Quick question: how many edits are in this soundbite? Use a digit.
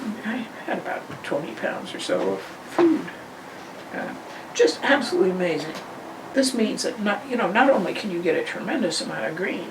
1